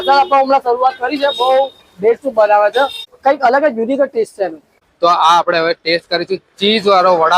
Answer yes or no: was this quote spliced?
yes